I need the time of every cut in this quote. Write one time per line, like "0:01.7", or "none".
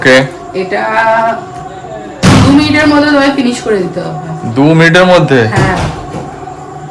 none